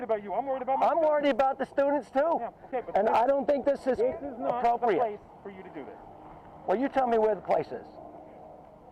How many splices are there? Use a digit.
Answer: 0